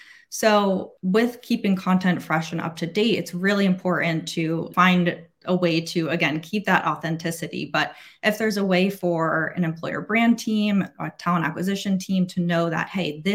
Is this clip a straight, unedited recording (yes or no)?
no